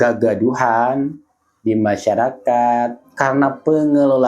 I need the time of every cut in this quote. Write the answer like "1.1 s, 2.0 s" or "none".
3.0 s